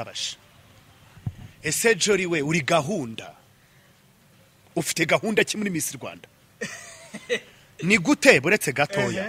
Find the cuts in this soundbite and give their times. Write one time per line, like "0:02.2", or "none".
0:01.0